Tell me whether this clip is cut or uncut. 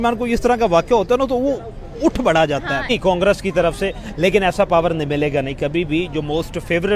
cut